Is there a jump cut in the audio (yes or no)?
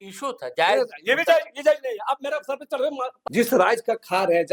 yes